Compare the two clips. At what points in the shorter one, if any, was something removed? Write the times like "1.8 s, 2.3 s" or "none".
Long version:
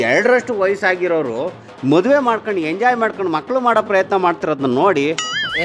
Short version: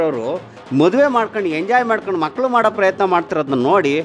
none